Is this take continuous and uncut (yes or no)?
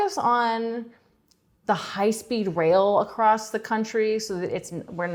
yes